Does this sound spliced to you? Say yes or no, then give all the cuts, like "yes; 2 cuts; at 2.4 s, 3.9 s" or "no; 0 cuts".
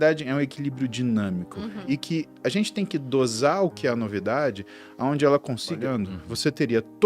yes; 1 cut; at 5.8 s